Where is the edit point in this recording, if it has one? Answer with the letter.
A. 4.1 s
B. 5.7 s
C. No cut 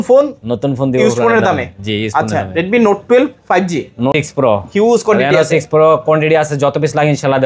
A